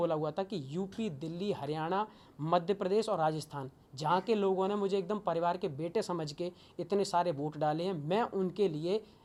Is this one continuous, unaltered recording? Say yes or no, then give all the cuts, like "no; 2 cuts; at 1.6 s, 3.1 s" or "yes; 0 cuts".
yes; 0 cuts